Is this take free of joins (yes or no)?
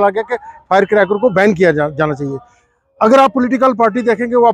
yes